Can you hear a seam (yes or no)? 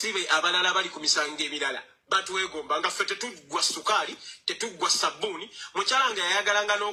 no